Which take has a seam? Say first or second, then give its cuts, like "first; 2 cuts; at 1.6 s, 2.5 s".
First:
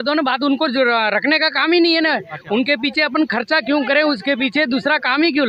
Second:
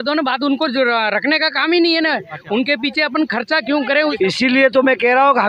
second; 1 cut; at 4.1 s